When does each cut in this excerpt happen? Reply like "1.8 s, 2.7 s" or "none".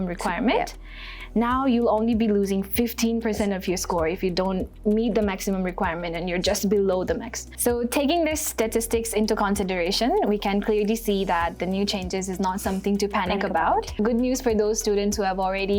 7.5 s, 14.0 s